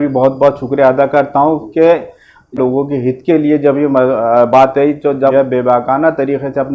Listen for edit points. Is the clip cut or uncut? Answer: cut